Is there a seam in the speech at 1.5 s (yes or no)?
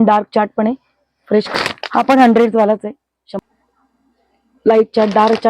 yes